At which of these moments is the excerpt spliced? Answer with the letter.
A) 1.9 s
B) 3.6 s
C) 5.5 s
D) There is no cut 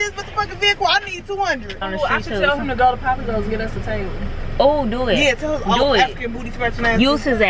A